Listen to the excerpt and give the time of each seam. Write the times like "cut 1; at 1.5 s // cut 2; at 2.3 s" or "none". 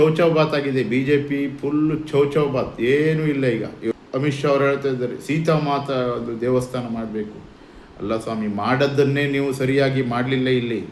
cut 1; at 3.9 s